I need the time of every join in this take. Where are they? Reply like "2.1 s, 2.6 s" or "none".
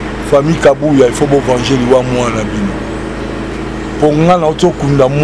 none